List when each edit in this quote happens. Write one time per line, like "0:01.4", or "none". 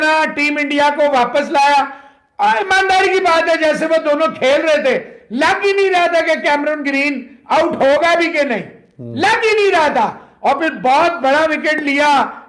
none